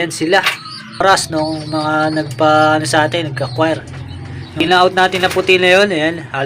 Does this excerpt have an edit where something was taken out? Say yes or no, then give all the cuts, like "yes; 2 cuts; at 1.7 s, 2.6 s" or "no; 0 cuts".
yes; 2 cuts; at 1.0 s, 4.6 s